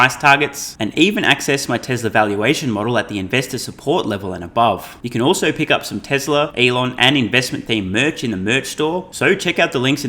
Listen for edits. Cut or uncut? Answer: cut